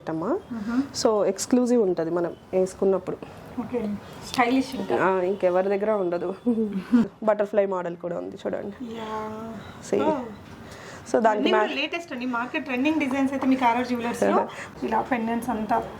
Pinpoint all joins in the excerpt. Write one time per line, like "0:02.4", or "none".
0:07.0
0:14.6